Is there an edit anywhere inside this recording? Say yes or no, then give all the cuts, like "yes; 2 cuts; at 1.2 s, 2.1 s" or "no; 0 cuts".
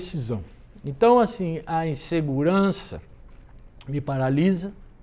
no; 0 cuts